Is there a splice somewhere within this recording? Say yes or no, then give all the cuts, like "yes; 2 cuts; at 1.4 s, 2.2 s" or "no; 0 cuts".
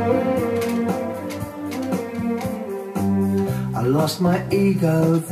yes; 1 cut; at 2.5 s